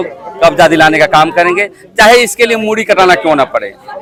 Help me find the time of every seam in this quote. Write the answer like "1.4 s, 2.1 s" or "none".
none